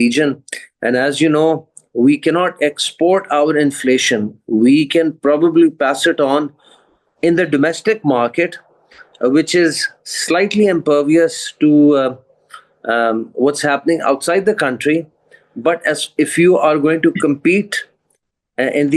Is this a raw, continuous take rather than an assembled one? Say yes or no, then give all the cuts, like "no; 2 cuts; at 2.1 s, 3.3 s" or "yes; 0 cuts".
yes; 0 cuts